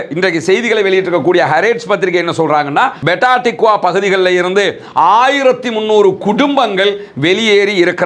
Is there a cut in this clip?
yes; 1 cut; at 3.0 s

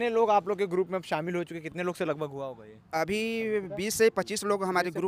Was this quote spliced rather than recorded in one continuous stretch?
no; 0 cuts

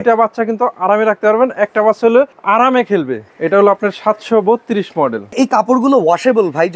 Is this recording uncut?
no; 3 cuts; at 2.4 s, 3.2 s, 5.3 s

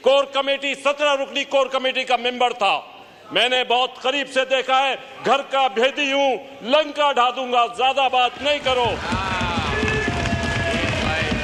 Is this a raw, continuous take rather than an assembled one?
yes; 0 cuts

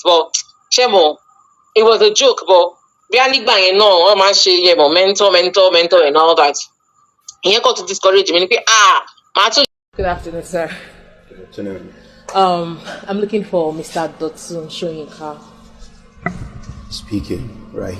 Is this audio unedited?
no; 1 cut; at 9.7 s

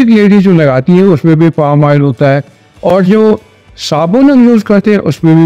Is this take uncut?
yes; 0 cuts

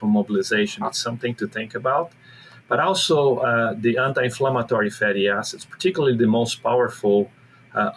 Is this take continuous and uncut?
yes; 0 cuts

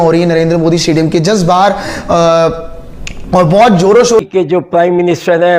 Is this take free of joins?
no; 1 cut; at 4.2 s

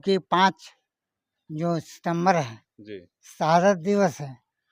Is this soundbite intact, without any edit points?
yes; 0 cuts

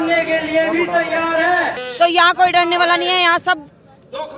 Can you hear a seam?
yes; 1 cut; at 1.8 s

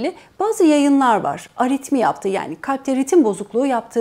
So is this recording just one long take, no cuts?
yes; 0 cuts

